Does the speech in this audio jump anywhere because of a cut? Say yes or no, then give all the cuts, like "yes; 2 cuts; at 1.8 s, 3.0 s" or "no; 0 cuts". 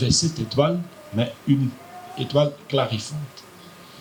no; 0 cuts